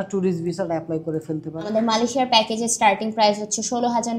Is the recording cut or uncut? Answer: cut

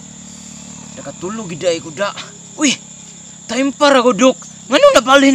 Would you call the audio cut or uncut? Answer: uncut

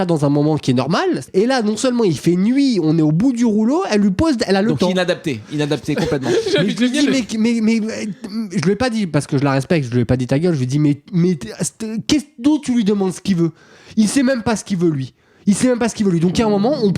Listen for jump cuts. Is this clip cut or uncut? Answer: cut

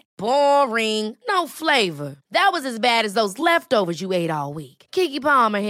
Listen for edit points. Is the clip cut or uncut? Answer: uncut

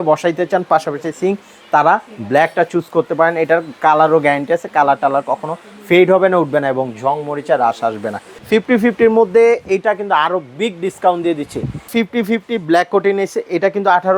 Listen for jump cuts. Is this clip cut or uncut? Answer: cut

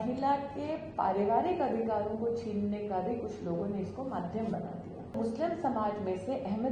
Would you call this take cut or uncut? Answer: cut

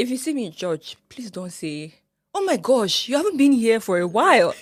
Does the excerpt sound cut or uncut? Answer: uncut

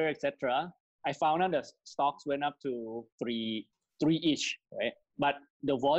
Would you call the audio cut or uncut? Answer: uncut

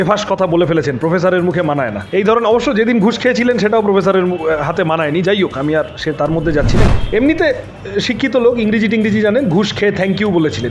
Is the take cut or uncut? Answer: cut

